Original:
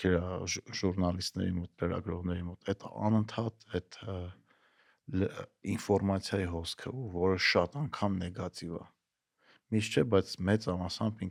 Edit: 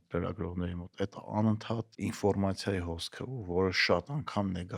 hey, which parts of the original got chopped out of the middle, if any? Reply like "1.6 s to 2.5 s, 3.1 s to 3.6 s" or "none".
3.6 s to 5.6 s